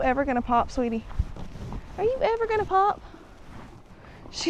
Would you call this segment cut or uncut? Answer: uncut